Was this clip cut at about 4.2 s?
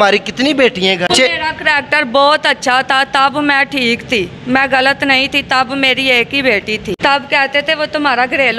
no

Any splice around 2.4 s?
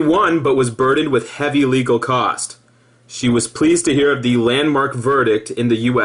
yes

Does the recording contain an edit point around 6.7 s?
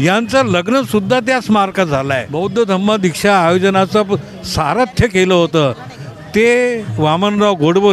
no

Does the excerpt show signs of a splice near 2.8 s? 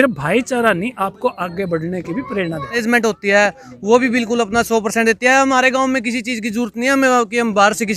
yes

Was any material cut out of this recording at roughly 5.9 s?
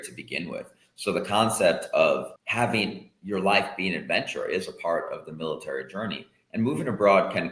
no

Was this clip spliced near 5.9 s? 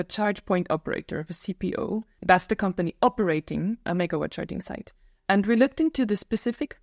no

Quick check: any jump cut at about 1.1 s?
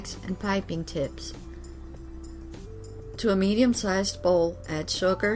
yes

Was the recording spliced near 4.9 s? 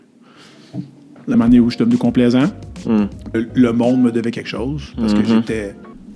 no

